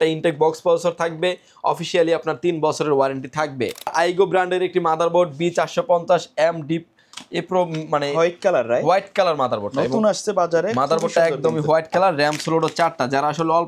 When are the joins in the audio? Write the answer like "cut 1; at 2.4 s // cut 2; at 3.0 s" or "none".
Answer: cut 1; at 3.9 s

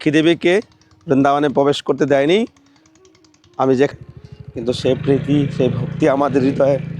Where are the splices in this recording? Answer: cut 1; at 3.9 s

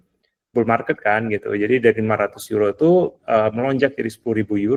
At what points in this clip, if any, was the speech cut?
none

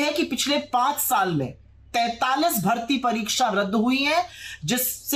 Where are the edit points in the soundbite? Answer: none

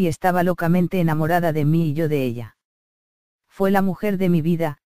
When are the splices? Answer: cut 1; at 4.0 s

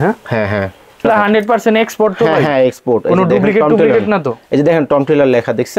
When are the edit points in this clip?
cut 1; at 1.0 s

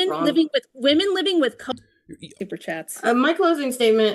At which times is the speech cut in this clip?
cut 1; at 2.3 s

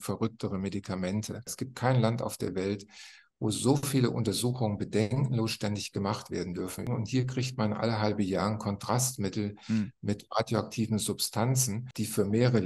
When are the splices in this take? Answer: cut 1; at 1.5 s // cut 2; at 6.9 s // cut 3; at 11.9 s

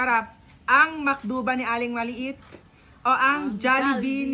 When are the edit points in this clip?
none

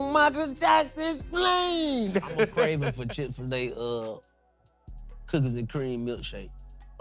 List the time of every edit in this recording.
cut 1; at 2.7 s

